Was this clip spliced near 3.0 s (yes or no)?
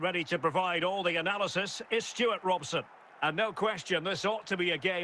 yes